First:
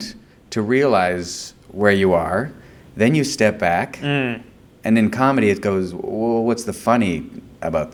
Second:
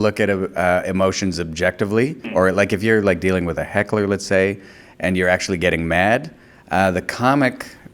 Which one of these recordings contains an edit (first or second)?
second